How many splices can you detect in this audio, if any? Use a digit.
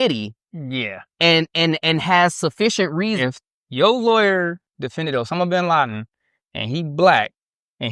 1